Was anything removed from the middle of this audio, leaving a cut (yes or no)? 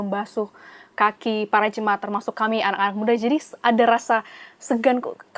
no